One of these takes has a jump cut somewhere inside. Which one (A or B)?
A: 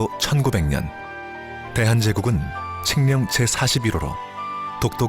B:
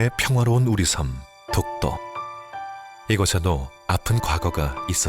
A